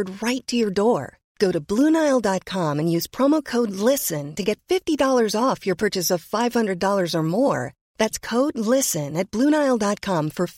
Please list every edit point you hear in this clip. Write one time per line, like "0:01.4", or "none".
none